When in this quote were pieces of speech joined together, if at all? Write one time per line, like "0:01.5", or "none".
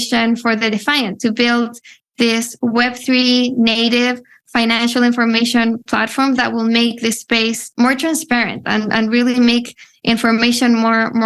none

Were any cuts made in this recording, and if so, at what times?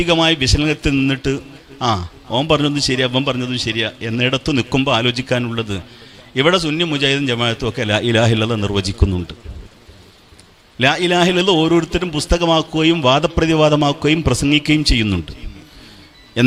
none

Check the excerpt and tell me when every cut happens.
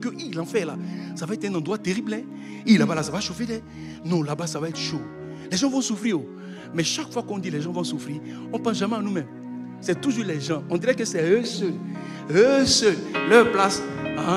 none

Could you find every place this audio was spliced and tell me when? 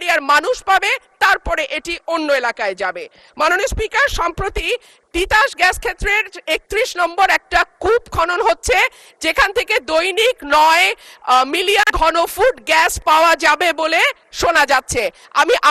none

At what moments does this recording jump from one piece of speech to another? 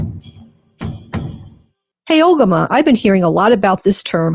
0:01.9

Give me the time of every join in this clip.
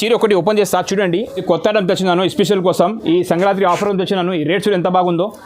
0:01.4

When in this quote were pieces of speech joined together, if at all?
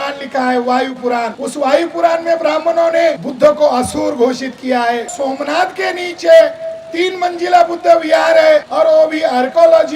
0:01.4
0:03.3
0:05.1
0:08.7

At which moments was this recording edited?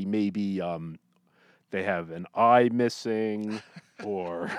none

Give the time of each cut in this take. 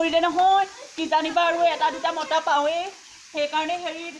none

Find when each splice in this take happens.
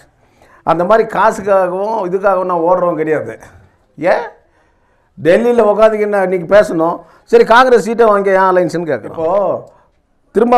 0:09.1

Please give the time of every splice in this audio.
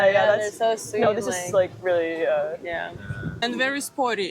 0:03.4

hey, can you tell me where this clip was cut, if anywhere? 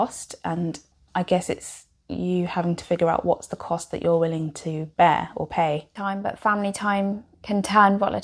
0:00.9
0:05.9

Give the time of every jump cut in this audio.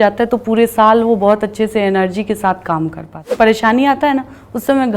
0:03.3

